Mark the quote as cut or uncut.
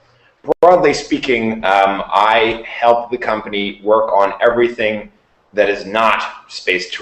uncut